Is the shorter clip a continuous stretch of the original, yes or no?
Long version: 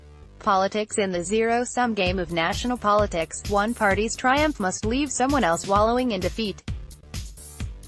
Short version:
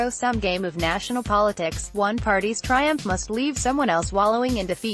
yes